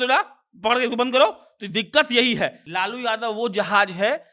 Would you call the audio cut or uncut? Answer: cut